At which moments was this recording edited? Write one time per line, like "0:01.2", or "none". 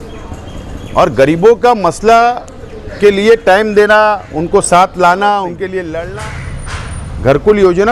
0:06.1